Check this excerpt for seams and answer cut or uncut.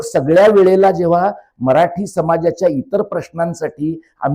uncut